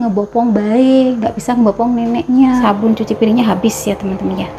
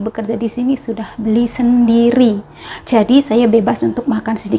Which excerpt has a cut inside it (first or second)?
first